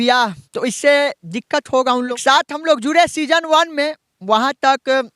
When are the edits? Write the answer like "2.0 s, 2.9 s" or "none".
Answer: 2.2 s